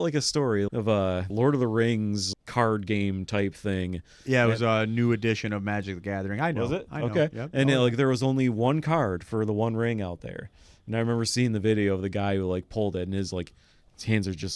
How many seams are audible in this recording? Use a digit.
2